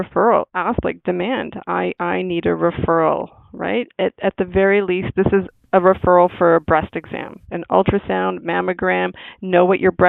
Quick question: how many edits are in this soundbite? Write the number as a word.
zero